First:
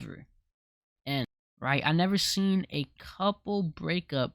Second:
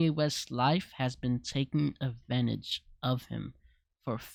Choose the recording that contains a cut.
first; 1 cut; at 1.4 s

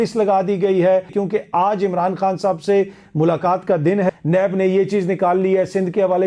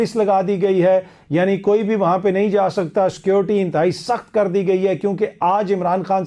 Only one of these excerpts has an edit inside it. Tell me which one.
first; 2 cuts; at 1.1 s, 4.1 s

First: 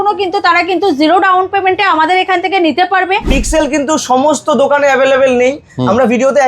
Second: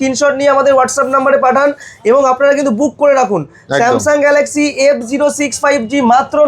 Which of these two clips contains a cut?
first; 1 cut; at 3.3 s

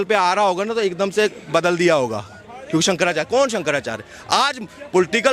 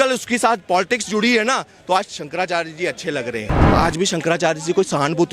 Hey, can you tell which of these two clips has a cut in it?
second; 1 cut; at 3.6 s

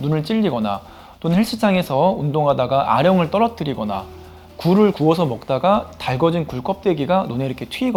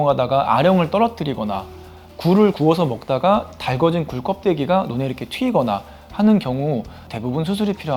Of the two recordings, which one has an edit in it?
second; 1 cut; at 7.1 s

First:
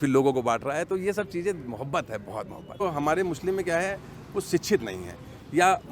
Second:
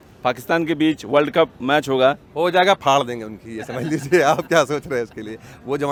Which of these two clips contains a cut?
first; 1 cut; at 2.8 s

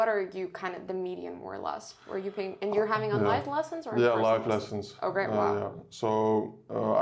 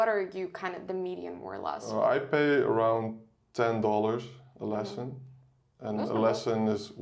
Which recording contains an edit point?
second; 1 cut; at 1.8 s

